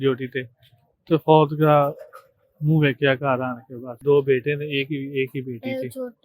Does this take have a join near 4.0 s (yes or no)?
yes